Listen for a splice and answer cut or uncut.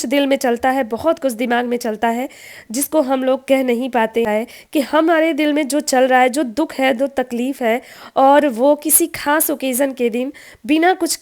cut